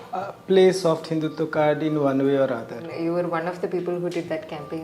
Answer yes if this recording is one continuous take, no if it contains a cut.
no